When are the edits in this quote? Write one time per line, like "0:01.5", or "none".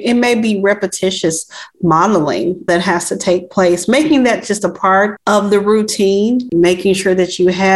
0:05.2
0:06.5

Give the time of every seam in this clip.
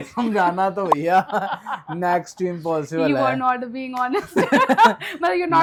none

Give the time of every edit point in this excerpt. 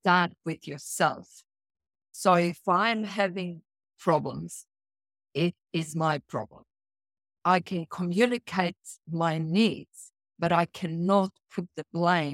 0:07.4

